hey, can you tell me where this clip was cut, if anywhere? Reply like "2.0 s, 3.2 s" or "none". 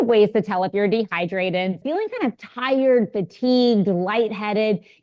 1.8 s